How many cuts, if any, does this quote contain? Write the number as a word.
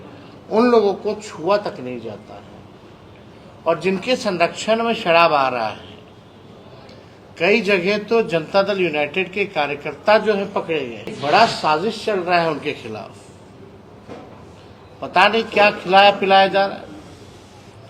one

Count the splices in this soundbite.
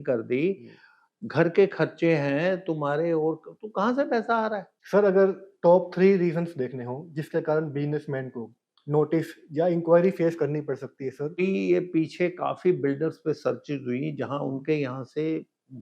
two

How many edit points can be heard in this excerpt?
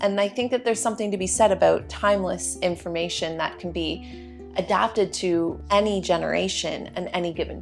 zero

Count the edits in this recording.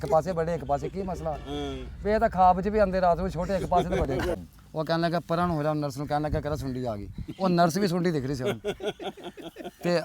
one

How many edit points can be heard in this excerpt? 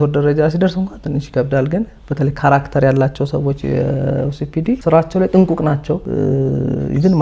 two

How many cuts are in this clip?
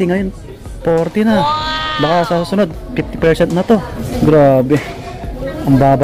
one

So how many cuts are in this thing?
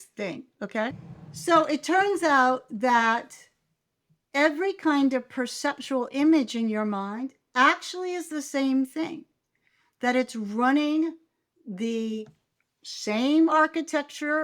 one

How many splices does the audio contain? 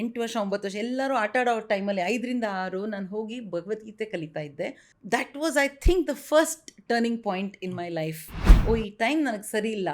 two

